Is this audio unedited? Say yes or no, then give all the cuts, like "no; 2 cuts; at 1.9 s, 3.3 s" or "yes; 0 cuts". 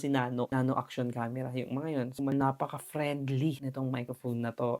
no; 1 cut; at 2.3 s